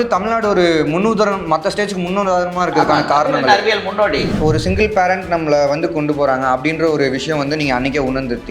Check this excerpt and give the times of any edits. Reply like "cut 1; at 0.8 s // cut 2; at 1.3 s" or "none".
cut 1; at 4.3 s